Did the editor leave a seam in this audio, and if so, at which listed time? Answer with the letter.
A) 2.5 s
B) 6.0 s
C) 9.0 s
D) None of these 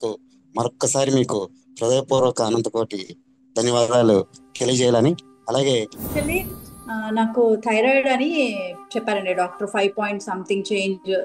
B